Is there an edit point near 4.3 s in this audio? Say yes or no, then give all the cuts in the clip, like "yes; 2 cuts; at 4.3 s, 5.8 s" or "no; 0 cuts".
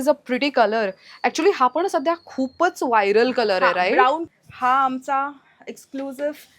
yes; 1 cut; at 4.3 s